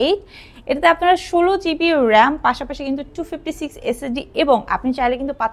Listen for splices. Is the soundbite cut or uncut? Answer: uncut